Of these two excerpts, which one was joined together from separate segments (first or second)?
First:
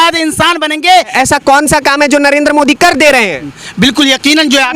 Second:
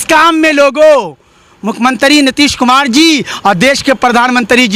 first